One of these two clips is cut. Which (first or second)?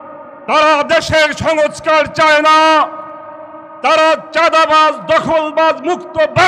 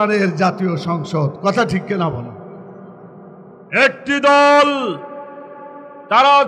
second